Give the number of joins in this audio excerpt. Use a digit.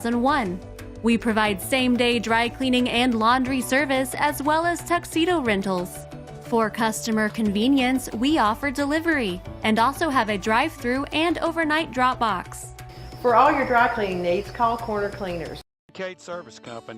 1